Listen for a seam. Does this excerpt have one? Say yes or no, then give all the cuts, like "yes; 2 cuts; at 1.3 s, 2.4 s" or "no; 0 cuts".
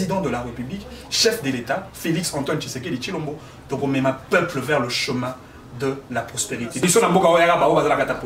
yes; 1 cut; at 6.8 s